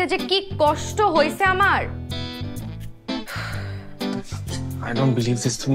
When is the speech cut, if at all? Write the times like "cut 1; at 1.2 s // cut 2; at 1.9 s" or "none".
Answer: cut 1; at 1.8 s // cut 2; at 4.8 s